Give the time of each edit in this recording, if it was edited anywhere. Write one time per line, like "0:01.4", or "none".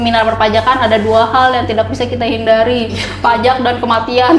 none